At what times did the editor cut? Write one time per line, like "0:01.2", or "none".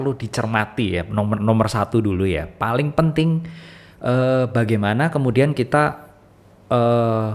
none